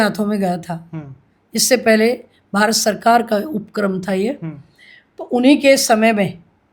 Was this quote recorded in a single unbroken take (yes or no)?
yes